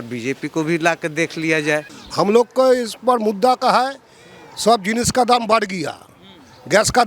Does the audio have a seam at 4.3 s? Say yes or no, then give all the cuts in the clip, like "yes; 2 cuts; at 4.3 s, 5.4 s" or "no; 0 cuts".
no; 1 cut; at 2.0 s